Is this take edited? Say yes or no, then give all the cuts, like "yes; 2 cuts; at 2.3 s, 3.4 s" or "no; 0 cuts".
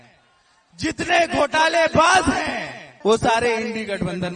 yes; 1 cut; at 2.9 s